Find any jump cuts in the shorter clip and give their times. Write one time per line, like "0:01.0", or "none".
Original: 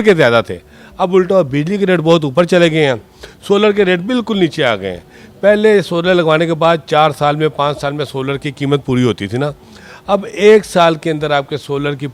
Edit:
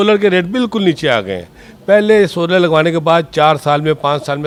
none